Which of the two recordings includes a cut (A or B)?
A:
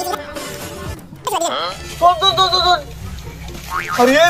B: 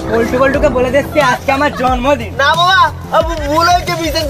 A